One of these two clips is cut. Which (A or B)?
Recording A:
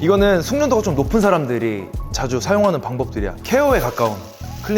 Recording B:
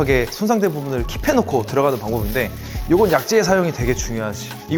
A